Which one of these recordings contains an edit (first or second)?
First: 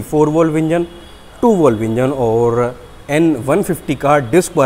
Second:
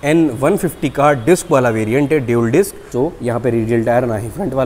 second